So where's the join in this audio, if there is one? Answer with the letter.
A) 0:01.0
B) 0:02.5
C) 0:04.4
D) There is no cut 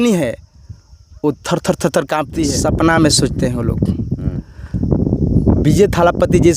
B